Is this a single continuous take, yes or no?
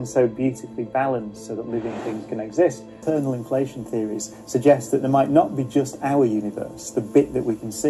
no